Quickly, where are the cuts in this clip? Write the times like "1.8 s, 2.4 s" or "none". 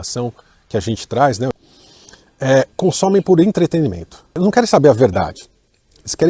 1.6 s, 4.2 s